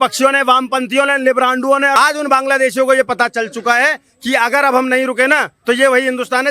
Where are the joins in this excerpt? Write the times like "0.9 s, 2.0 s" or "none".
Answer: 2.0 s

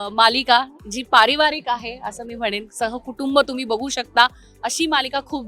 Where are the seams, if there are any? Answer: none

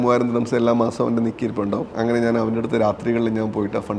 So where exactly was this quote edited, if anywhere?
1.9 s

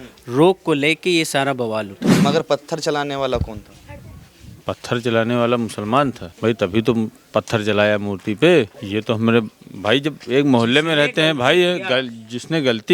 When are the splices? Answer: 2.2 s, 6.3 s, 8.8 s

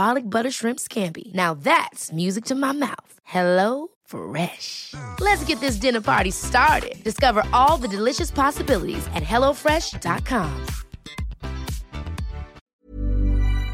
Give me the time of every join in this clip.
12.6 s

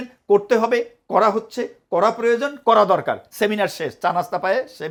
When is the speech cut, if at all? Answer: none

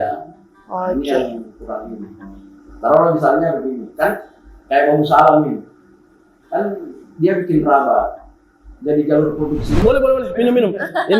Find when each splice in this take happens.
9.8 s

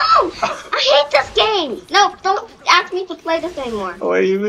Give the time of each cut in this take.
none

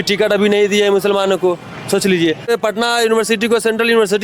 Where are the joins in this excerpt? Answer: 2.5 s

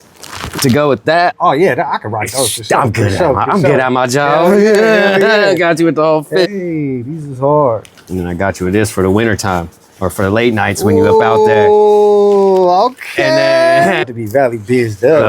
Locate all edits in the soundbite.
1.3 s, 6.5 s, 8.1 s, 14.0 s

